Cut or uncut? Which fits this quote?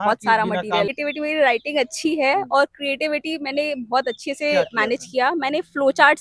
cut